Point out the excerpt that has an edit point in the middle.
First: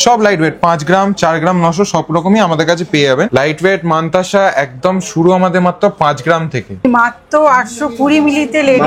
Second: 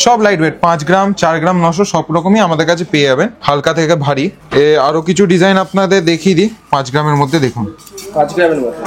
first; 2 cuts; at 3.3 s, 6.8 s

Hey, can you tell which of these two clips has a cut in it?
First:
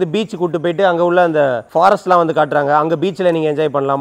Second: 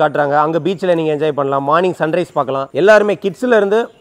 second; 1 cut; at 2.7 s

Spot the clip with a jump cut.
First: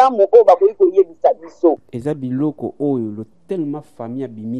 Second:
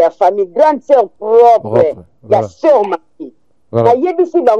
first; 1 cut; at 1.9 s

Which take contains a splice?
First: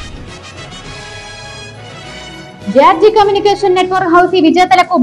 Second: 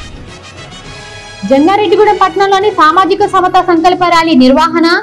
second; 1 cut; at 1.4 s

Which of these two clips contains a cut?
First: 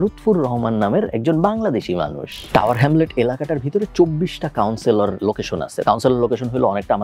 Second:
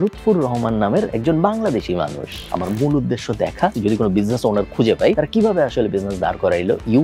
second; 2 cuts; at 2.5 s, 3.8 s

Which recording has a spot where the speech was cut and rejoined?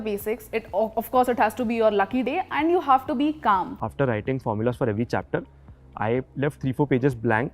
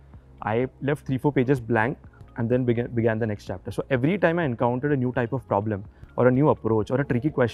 first; 1 cut; at 3.8 s

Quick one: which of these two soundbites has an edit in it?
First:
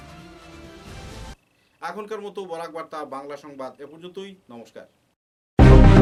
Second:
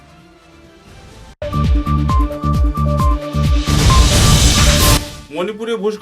second; 2 cuts; at 1.3 s, 5.1 s

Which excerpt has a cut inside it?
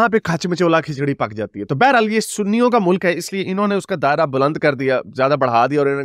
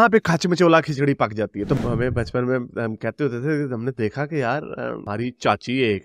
second; 1 cut; at 1.7 s

